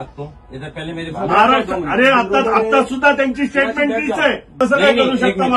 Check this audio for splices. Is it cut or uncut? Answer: cut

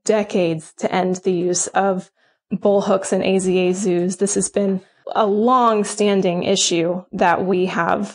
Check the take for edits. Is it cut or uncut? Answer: cut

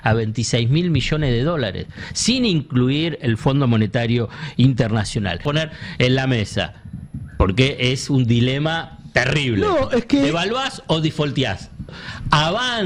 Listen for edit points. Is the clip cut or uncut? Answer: cut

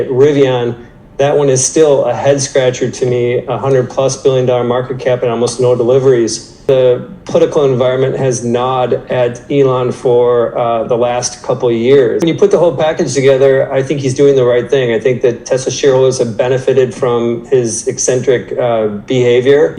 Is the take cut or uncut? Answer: cut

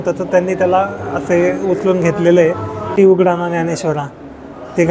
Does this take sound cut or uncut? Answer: cut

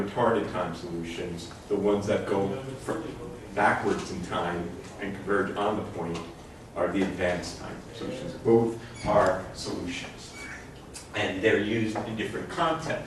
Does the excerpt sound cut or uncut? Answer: cut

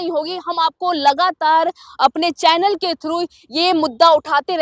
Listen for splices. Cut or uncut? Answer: uncut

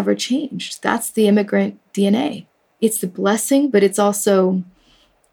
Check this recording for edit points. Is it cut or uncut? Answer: cut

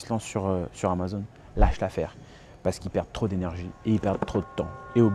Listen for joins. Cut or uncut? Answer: uncut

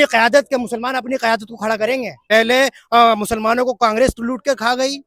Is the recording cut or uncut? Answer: cut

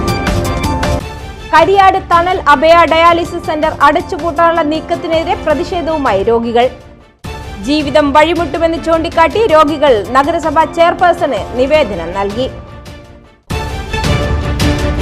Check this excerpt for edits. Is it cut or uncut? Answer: cut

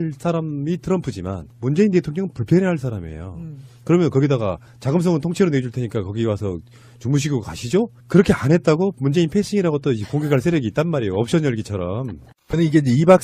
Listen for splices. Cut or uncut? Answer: cut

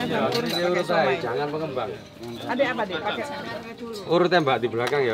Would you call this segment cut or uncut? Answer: uncut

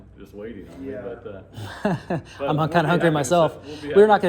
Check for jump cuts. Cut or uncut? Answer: uncut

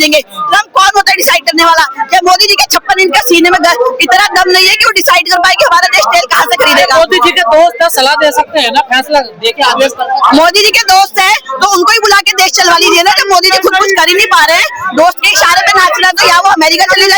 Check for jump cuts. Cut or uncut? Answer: uncut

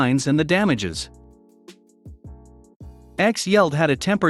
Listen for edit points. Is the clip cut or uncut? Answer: cut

